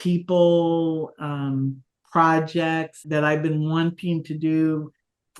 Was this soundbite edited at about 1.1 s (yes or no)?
no